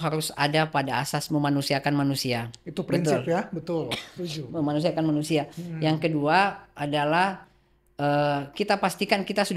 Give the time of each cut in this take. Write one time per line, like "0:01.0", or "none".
none